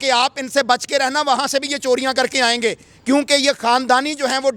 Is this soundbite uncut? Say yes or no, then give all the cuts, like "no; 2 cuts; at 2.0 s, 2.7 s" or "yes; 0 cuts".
yes; 0 cuts